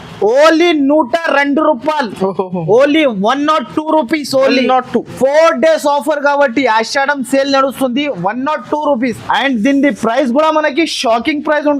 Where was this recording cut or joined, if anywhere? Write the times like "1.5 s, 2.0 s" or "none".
9.2 s